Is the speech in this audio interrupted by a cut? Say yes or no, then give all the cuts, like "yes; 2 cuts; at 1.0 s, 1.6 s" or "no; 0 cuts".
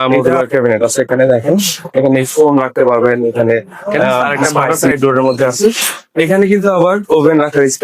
yes; 1 cut; at 4.8 s